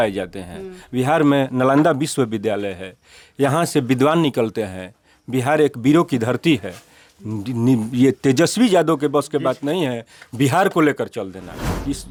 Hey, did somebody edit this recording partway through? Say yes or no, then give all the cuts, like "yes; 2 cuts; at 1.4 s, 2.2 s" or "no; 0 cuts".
no; 0 cuts